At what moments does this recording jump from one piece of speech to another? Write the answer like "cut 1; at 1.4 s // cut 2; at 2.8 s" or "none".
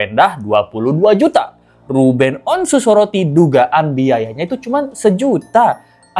none